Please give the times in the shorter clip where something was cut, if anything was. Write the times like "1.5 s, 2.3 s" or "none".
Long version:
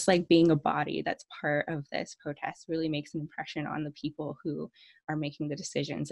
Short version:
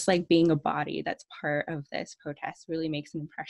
none